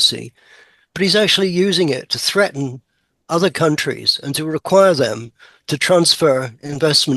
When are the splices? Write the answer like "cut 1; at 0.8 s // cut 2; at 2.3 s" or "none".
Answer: none